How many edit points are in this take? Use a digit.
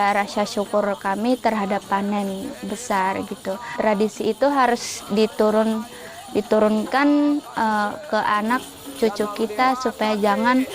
1